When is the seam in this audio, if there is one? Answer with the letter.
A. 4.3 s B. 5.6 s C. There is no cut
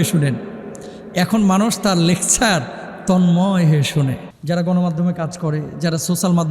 A